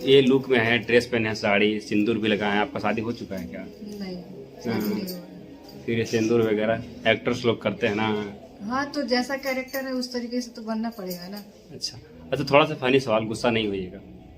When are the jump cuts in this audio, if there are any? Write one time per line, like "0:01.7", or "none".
none

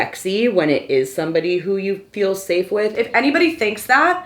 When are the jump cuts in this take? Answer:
0:02.9

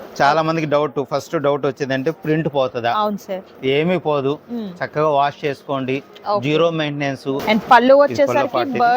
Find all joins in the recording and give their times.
0:07.4

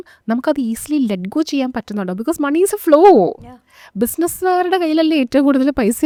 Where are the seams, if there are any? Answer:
none

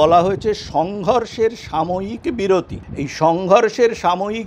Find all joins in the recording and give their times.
0:02.8

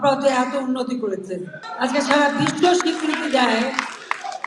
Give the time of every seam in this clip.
0:01.6

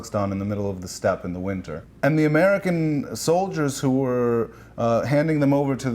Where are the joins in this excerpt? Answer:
0:01.8

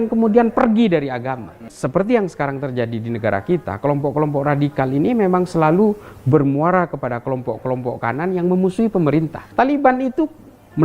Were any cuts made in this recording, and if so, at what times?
0:01.7
0:09.4

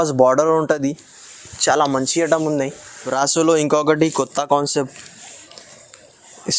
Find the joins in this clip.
0:03.0

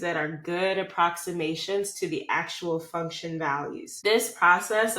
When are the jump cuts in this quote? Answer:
0:03.9

